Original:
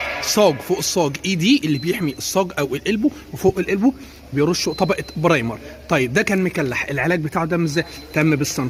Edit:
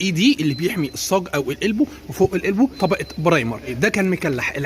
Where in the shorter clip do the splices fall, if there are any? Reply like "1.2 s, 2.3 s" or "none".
2.7 s, 3.7 s